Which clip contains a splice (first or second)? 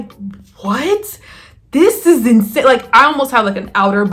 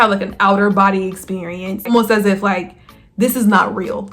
second